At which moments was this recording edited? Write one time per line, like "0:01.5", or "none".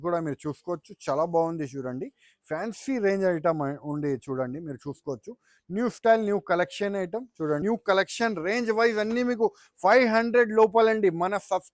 0:07.6